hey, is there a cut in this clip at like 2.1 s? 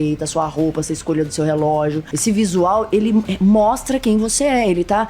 yes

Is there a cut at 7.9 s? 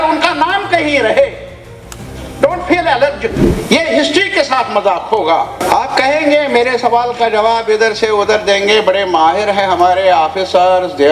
no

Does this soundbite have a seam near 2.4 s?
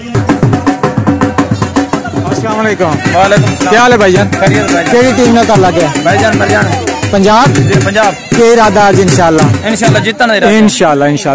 yes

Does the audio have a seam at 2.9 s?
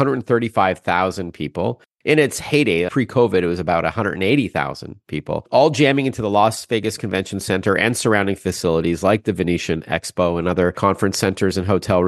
yes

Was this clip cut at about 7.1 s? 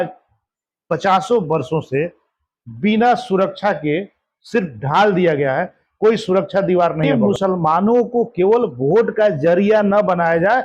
yes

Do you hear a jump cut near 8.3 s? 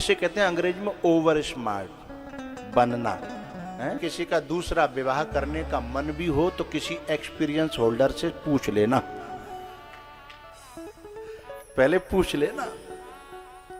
no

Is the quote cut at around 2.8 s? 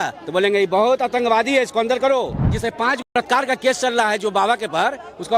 yes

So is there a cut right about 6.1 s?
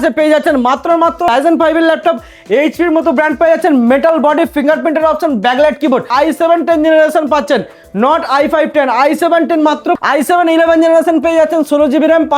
yes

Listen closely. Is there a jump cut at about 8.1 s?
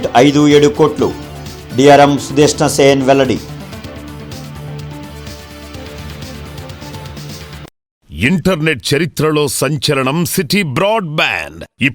yes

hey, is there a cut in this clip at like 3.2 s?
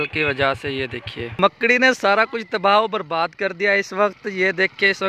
no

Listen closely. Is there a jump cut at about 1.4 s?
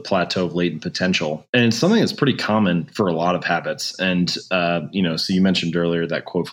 yes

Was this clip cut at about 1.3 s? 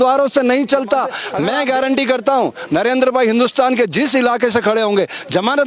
yes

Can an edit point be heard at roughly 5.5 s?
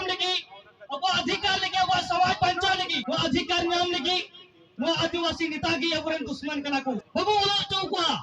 no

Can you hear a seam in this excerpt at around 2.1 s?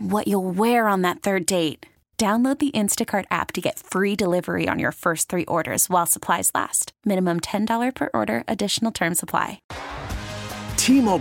no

